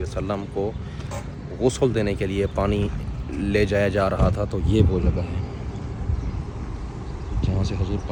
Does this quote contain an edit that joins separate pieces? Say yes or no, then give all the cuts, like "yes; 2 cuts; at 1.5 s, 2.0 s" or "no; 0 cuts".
no; 0 cuts